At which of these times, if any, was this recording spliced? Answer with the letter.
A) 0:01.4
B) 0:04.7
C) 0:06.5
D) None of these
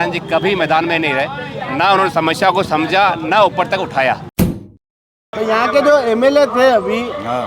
B